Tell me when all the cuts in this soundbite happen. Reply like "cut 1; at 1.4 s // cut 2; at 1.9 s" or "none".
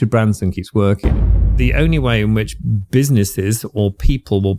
cut 1; at 1.4 s